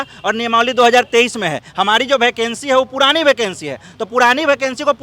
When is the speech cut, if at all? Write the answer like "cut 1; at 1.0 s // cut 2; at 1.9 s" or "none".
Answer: none